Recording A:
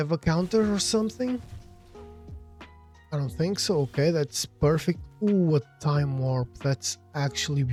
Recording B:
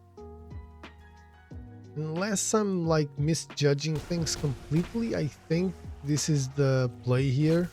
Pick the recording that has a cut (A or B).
B